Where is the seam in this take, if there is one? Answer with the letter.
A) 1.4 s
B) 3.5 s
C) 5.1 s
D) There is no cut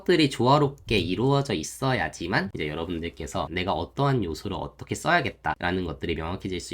B